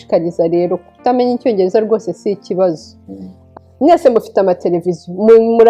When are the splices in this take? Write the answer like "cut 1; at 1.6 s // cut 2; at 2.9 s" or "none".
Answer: cut 1; at 3.4 s